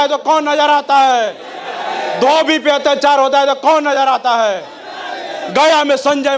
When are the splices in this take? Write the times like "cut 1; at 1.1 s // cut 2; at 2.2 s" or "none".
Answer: none